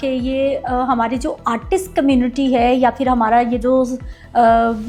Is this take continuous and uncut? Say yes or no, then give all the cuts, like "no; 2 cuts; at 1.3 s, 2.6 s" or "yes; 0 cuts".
yes; 0 cuts